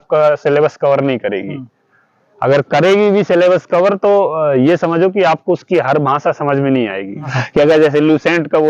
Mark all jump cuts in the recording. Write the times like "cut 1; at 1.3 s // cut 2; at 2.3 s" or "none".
cut 1; at 7.4 s